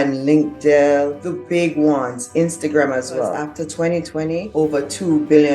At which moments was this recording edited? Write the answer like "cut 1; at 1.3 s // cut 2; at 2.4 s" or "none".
cut 1; at 3.4 s // cut 2; at 4.5 s